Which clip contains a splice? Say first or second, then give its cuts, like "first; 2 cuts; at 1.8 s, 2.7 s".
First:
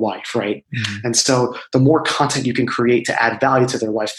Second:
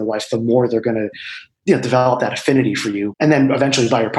second; 1 cut; at 3.1 s